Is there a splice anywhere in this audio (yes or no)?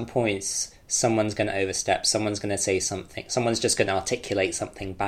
no